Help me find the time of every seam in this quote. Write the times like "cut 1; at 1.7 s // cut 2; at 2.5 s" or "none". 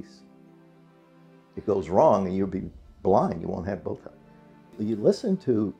cut 1; at 4.8 s

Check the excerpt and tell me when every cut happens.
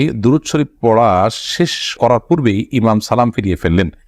none

